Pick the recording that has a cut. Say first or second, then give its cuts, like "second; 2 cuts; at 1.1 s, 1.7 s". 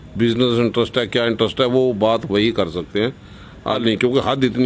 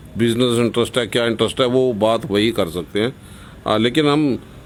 first; 1 cut; at 3.8 s